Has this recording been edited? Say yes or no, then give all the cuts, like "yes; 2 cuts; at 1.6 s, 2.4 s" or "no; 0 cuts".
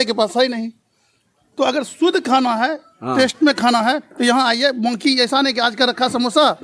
no; 0 cuts